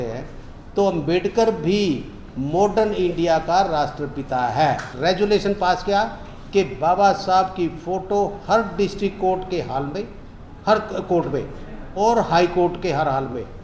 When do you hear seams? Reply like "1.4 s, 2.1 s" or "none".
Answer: 4.9 s